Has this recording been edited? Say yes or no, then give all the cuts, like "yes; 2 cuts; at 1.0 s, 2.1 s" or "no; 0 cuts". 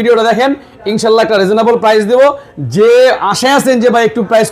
no; 0 cuts